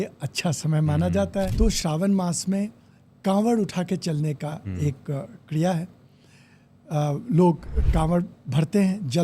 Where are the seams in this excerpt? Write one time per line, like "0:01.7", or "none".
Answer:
0:01.5